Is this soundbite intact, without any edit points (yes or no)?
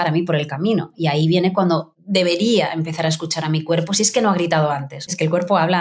no